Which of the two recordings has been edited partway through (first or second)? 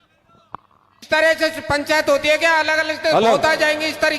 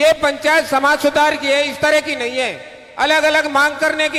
first